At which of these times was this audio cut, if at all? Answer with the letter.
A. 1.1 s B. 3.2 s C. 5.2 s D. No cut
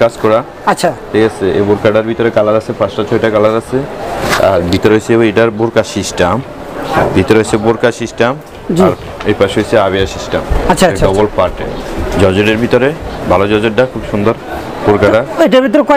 D